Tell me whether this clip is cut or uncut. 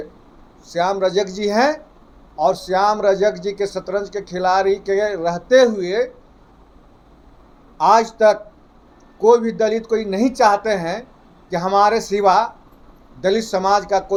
uncut